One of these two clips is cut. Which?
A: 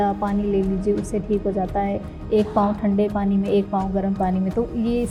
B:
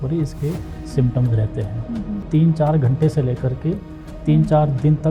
B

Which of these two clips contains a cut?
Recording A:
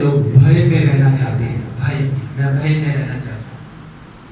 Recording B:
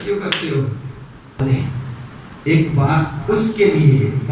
B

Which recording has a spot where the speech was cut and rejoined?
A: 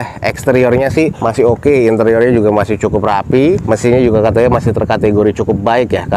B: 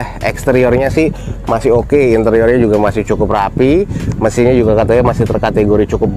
A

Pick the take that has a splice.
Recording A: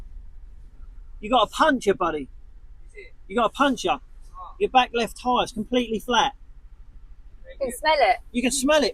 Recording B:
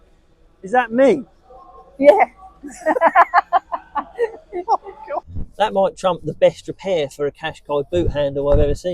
B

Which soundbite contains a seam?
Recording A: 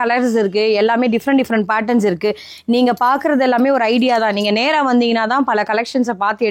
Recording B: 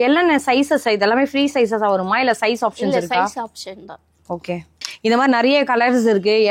B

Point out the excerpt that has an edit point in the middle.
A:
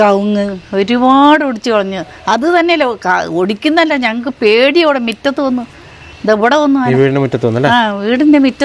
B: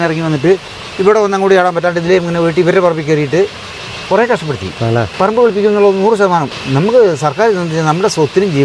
B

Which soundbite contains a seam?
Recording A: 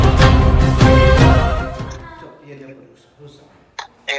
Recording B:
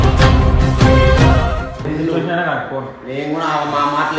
B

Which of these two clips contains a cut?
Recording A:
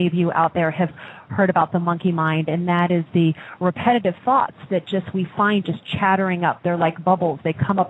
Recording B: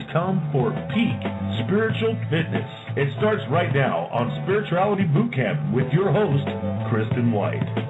A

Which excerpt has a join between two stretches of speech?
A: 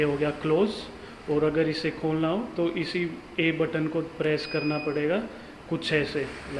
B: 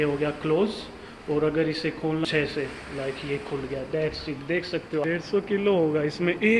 B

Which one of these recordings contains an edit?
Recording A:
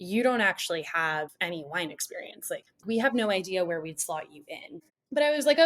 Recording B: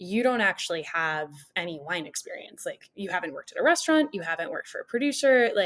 A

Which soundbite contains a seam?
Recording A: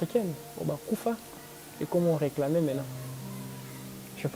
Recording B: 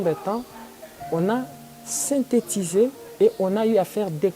B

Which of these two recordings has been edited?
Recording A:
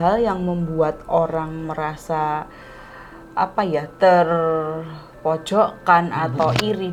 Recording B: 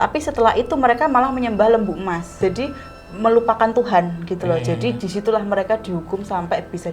B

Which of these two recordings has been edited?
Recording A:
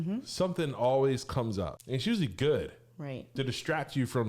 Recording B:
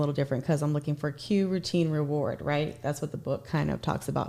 A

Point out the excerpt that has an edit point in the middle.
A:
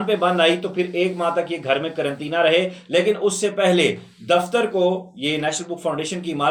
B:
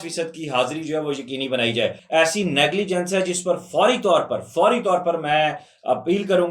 B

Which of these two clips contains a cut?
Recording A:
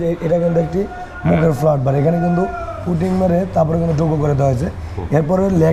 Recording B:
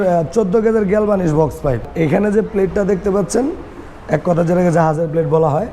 B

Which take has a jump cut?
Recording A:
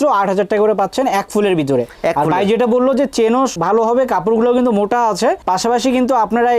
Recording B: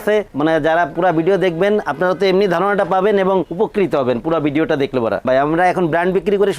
B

